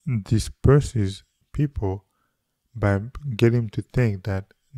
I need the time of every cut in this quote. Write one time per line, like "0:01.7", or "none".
none

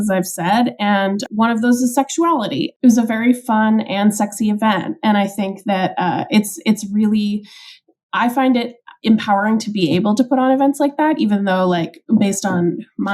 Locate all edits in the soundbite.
0:01.2
0:02.7

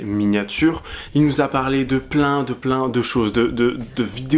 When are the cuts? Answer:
0:00.9

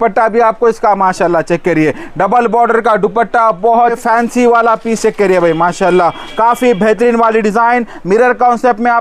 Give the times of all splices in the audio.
0:04.0

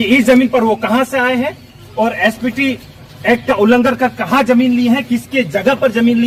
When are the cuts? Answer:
none

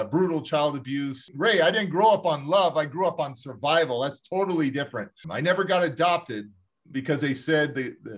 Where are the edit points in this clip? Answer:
0:01.3
0:05.3

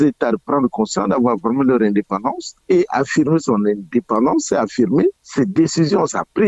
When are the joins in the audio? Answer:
0:02.5
0:05.2

